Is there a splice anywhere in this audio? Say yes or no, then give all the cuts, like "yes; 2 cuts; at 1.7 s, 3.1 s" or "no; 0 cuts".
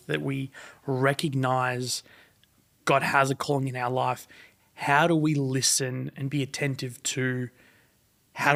no; 0 cuts